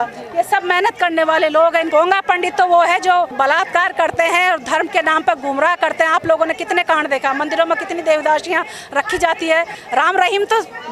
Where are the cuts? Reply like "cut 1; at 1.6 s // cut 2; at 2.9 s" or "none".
cut 1; at 1.9 s // cut 2; at 3.3 s // cut 3; at 9.8 s